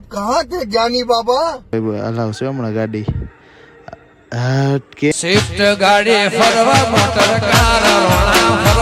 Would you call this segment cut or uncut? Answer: cut